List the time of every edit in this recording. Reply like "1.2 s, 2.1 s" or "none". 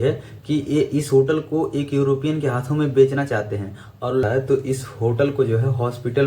4.2 s